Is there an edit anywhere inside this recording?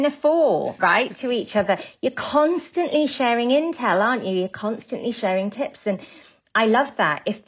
no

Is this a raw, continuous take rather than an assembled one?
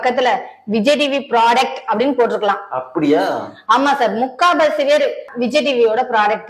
yes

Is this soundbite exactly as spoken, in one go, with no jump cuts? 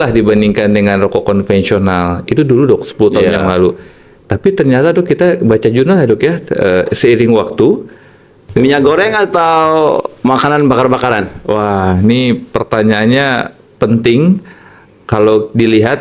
no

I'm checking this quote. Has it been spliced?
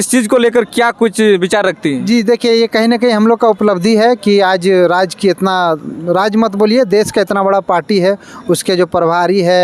no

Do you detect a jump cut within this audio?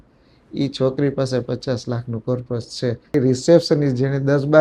yes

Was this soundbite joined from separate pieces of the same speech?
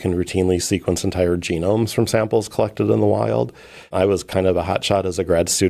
no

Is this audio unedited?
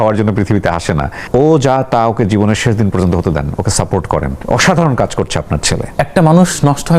no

